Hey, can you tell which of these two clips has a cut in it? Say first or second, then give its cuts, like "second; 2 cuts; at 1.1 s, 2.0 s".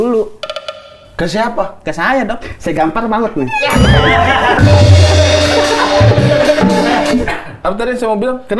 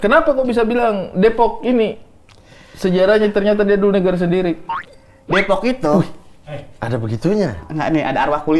first; 1 cut; at 7.2 s